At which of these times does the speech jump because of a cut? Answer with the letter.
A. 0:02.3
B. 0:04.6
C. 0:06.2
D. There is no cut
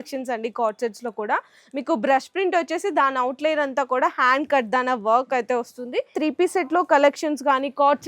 C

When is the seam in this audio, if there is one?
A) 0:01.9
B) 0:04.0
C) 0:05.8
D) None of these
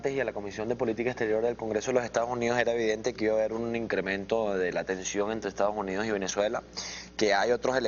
B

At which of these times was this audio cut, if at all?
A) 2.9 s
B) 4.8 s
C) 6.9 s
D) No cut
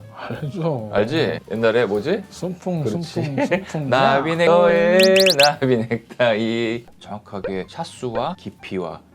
C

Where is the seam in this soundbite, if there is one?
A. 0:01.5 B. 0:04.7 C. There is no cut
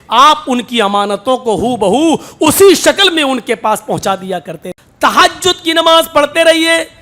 B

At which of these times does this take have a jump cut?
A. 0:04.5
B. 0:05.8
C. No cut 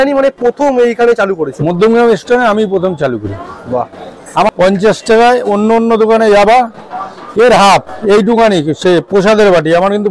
A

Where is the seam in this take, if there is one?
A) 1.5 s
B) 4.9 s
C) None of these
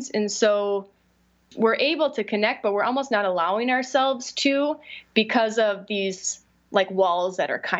A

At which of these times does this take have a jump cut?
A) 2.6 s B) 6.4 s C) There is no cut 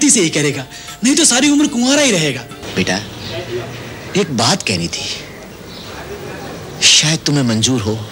A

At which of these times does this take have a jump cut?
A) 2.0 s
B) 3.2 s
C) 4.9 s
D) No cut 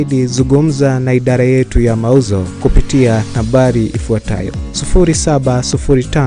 D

